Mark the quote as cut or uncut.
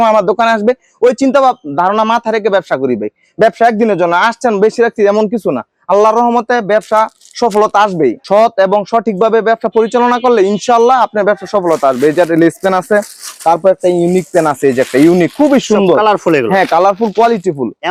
uncut